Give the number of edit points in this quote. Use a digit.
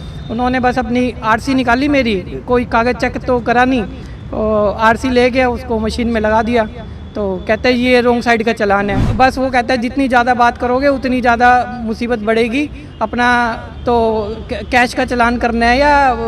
1